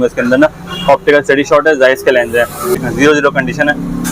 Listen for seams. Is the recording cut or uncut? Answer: cut